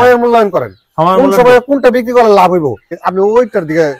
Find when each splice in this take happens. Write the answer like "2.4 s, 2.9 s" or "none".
3.0 s